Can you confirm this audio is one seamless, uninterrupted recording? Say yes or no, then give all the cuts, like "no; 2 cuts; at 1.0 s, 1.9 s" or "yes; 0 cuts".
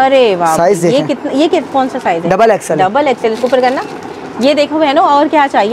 yes; 0 cuts